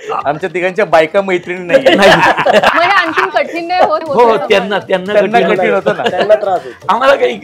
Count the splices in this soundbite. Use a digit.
2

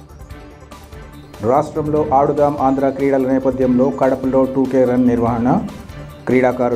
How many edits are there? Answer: 0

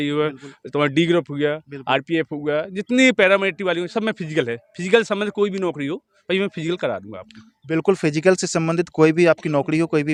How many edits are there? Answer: 0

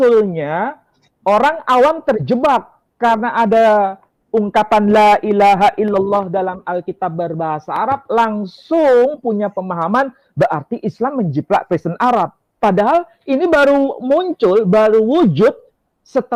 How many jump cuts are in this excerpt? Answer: 0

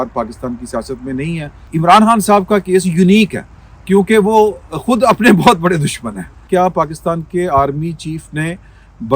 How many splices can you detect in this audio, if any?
2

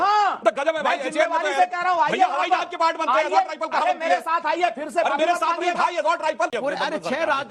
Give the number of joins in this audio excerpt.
1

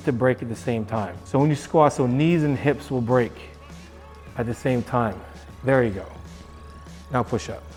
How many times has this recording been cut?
0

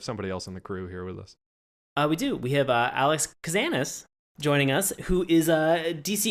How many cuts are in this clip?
1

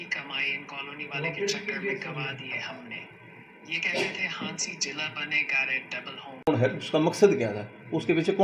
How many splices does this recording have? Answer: 1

